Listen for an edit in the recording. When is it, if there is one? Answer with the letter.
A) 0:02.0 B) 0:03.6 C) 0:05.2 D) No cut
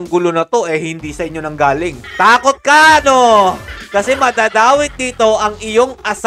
A